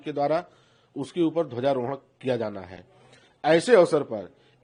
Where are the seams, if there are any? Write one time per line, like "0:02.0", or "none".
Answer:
none

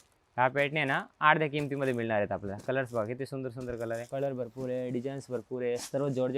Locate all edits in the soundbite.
0:04.1

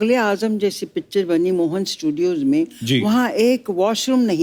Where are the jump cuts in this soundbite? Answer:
none

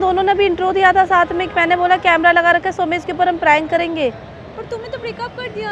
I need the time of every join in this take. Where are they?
none

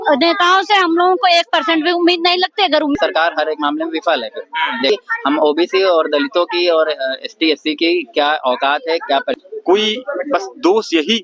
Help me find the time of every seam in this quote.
0:03.0
0:04.9
0:09.4

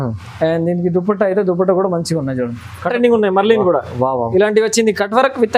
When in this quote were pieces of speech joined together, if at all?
0:02.9

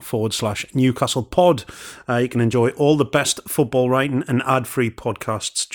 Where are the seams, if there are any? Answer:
0:02.5

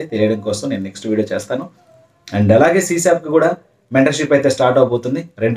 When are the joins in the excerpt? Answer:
none

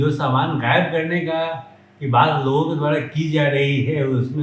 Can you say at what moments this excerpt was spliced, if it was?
none

